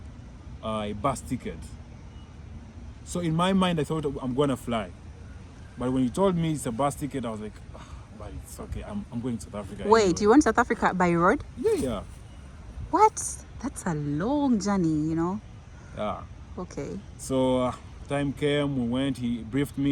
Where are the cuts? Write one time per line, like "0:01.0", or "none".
none